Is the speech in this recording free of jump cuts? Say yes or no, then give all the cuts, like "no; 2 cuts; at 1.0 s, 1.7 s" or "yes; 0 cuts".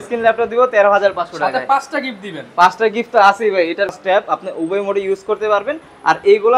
no; 1 cut; at 3.9 s